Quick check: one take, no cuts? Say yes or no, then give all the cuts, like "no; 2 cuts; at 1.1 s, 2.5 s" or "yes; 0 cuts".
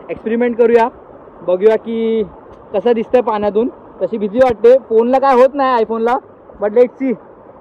yes; 0 cuts